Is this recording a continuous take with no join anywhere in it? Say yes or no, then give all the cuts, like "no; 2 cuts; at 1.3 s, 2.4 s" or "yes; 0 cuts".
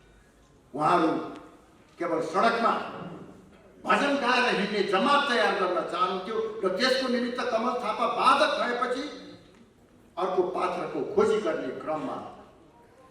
yes; 0 cuts